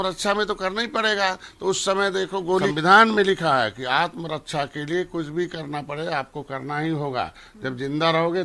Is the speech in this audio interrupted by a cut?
yes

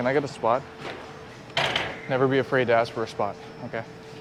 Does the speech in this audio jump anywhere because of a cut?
no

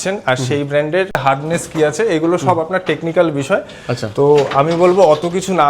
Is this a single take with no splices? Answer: no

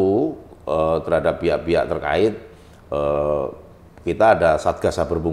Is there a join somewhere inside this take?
no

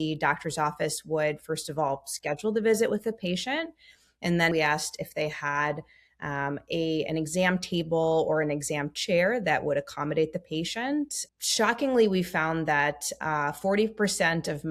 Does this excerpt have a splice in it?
yes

